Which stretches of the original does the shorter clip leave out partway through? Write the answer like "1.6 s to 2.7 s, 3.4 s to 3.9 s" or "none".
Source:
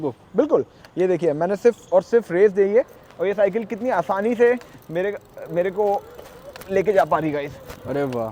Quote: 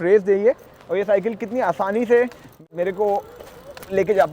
4.8 s to 5.3 s